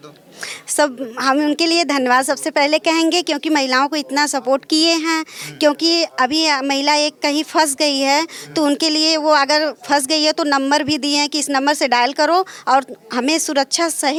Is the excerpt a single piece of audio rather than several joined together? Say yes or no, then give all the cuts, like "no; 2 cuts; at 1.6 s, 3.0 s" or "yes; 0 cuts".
yes; 0 cuts